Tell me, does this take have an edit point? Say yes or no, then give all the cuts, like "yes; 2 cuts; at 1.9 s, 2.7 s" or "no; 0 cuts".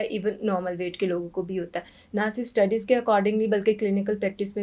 no; 0 cuts